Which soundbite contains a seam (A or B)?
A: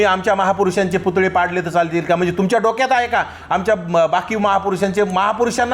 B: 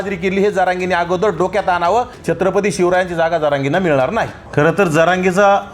B